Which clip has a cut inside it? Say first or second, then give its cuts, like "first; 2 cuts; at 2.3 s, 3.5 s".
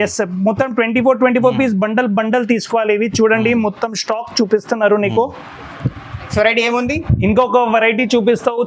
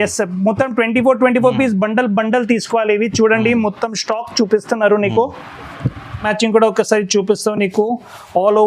second; 1 cut; at 6.3 s